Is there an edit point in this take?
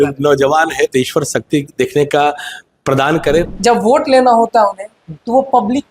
yes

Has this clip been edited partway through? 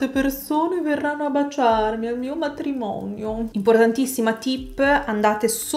no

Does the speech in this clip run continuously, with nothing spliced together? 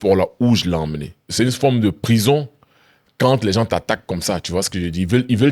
no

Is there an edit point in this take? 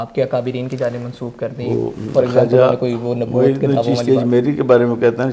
no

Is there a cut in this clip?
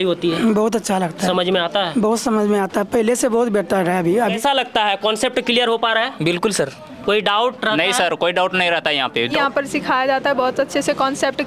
yes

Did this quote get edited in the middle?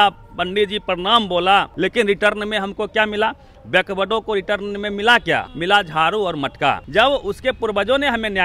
yes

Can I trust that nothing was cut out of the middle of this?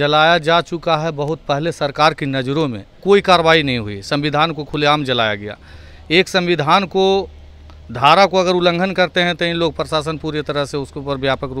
no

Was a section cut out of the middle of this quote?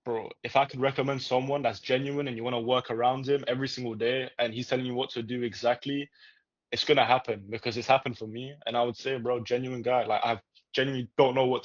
no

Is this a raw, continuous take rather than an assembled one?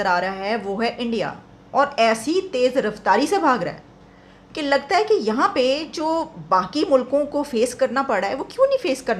yes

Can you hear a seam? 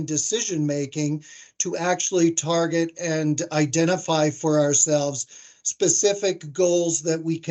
no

